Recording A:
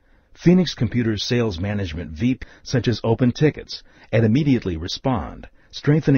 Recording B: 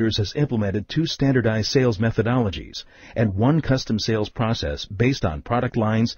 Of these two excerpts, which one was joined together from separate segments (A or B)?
A